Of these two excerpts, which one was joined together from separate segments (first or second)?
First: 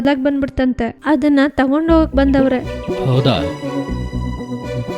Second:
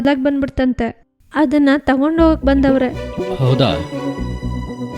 first